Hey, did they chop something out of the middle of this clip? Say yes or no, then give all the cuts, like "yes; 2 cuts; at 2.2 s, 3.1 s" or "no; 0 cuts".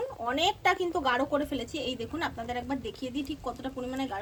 no; 0 cuts